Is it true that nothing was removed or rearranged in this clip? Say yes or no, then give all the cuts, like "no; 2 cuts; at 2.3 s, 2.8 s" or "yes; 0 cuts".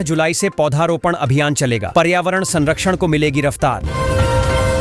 yes; 0 cuts